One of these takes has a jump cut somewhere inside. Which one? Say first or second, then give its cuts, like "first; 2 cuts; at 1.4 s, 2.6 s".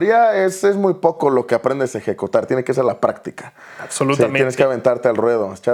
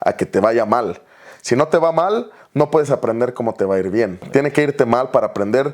second; 1 cut; at 4.2 s